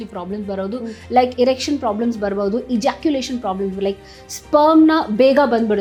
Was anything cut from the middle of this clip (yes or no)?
no